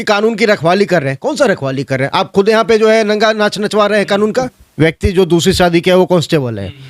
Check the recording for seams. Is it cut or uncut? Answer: cut